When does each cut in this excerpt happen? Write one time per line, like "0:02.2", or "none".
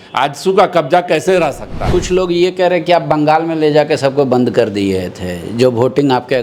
0:01.9